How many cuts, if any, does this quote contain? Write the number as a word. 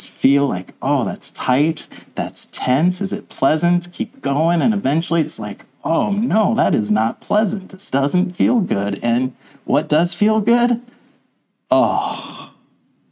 zero